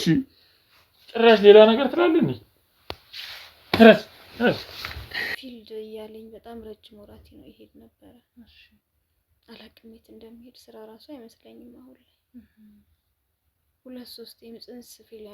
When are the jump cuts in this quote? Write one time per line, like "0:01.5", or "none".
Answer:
0:05.3